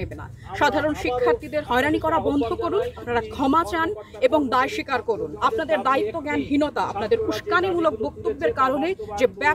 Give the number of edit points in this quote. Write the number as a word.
two